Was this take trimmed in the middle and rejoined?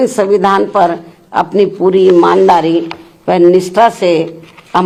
no; 0 cuts

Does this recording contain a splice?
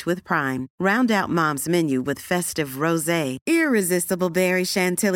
no; 0 cuts

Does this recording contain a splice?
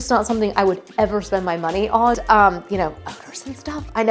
yes; 1 cut; at 2.2 s

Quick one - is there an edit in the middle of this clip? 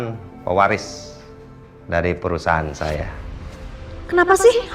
yes; 1 cut; at 3.4 s

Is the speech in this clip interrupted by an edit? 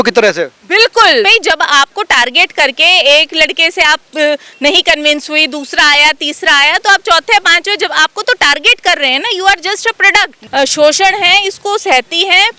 yes; 2 cuts; at 1.3 s, 10.4 s

